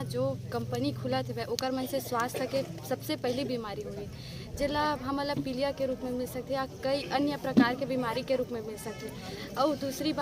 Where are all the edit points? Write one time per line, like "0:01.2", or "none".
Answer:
none